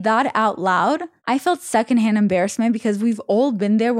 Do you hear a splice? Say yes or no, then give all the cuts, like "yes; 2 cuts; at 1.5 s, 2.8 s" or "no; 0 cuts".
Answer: yes; 1 cut; at 1.1 s